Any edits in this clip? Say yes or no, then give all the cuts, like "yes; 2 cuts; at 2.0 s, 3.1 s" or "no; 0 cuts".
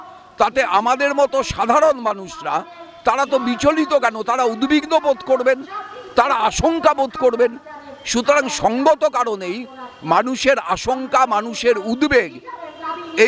no; 0 cuts